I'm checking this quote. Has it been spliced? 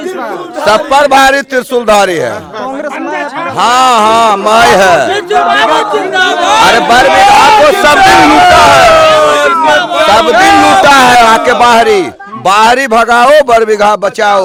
no; 0 cuts

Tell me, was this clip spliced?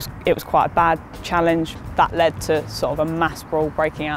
yes; 2 cuts; at 1.9 s, 2.9 s

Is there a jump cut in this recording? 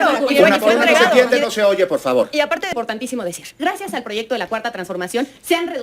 yes; 1 cut; at 2.7 s

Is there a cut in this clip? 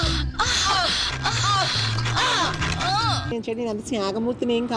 yes; 1 cut; at 3.3 s

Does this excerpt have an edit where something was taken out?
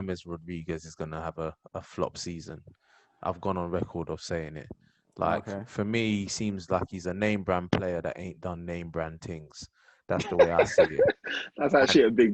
no; 0 cuts

